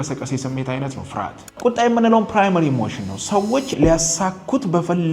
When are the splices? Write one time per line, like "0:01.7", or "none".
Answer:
0:01.5